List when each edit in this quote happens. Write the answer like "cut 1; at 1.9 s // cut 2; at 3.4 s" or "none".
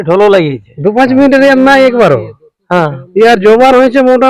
none